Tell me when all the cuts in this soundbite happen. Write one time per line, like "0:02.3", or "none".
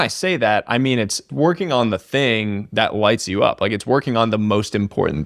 0:01.3

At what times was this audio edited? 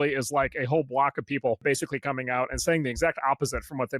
0:01.6

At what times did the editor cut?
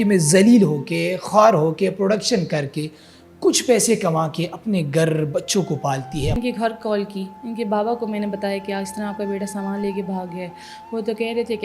0:06.4

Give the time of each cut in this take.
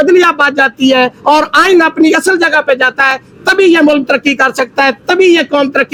none

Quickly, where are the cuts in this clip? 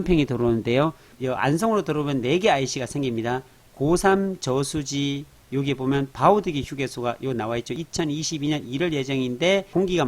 0:01.1

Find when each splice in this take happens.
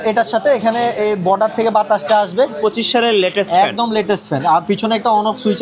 0:02.6

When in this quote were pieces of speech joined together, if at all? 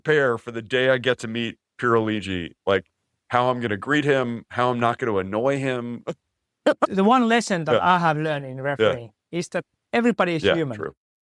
0:06.9

